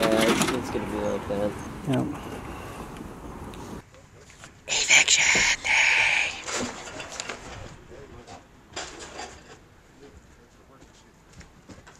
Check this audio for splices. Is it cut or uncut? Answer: uncut